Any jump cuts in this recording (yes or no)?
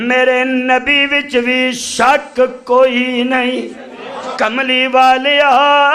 yes